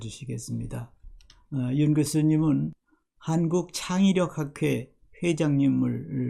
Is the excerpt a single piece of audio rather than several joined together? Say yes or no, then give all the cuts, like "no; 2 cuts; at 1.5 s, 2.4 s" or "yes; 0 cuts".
no; 1 cut; at 2.8 s